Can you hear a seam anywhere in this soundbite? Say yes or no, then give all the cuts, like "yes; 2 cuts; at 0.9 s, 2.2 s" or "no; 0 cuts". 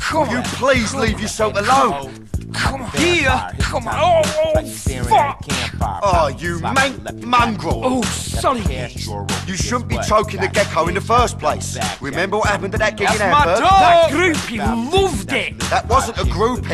no; 0 cuts